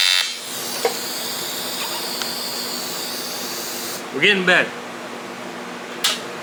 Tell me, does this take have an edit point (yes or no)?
no